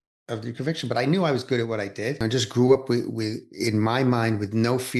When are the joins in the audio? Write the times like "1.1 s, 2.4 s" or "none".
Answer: 2.2 s